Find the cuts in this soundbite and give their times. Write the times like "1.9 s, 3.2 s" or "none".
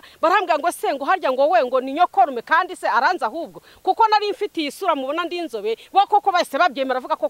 none